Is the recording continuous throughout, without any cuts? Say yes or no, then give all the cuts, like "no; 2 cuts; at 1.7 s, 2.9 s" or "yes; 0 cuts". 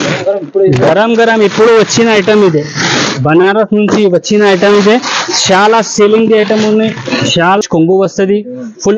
no; 1 cut; at 7.6 s